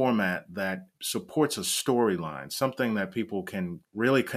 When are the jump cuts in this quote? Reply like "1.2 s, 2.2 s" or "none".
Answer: none